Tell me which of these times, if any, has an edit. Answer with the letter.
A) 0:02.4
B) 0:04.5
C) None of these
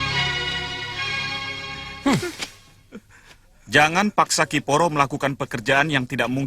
C